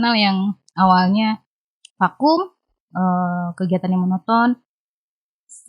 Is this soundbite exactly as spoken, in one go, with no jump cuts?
yes; 0 cuts

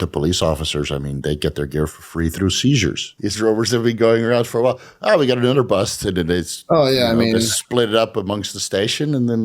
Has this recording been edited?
yes; 1 cut; at 3.1 s

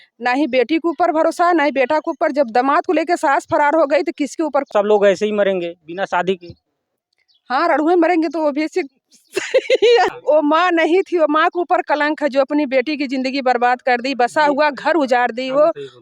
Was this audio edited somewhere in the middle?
yes; 2 cuts; at 4.7 s, 10.1 s

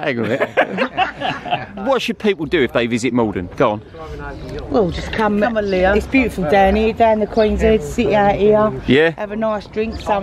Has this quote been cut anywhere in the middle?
yes; 1 cut; at 1.7 s

